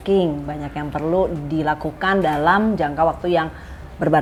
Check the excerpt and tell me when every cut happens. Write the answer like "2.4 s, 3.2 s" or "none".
none